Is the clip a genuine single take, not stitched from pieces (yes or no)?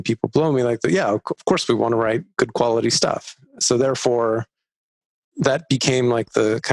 yes